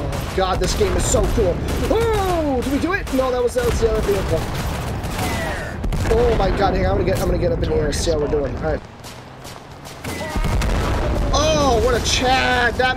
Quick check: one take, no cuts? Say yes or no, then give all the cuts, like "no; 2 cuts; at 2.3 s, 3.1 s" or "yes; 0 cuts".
no; 1 cut; at 8.8 s